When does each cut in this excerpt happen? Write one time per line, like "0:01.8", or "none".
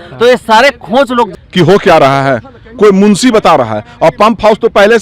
0:01.3

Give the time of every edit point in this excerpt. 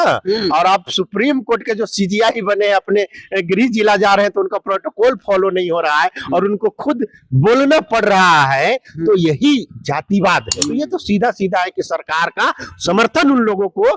0:10.6

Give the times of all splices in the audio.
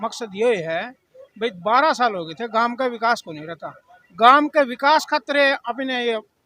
none

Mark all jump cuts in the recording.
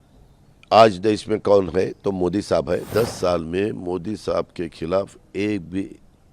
0:02.9

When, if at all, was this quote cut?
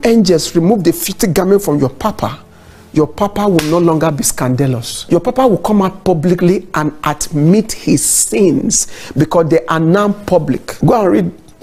0:04.9
0:10.7

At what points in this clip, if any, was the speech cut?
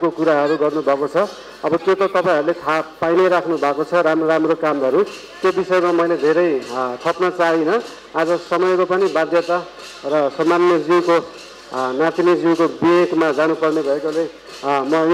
none

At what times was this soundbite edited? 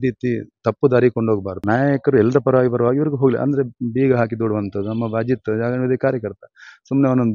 0:01.5

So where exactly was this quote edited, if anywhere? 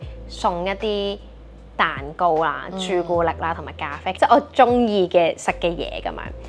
0:04.1

